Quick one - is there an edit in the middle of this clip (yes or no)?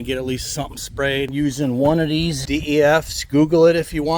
yes